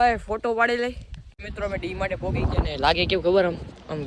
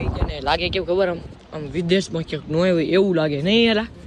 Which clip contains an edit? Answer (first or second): first